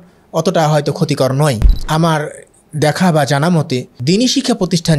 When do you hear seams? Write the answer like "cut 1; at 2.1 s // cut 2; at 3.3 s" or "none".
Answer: cut 1; at 1.7 s // cut 2; at 3.9 s